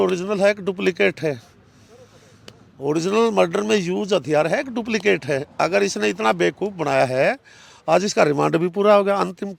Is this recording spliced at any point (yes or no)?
no